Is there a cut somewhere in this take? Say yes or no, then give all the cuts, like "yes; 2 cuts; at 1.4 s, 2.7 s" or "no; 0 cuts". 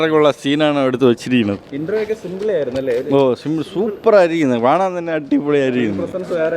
no; 0 cuts